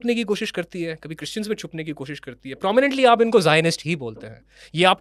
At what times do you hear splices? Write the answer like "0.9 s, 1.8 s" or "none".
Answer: none